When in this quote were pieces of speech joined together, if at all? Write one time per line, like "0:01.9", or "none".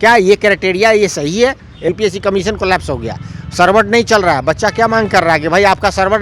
0:01.9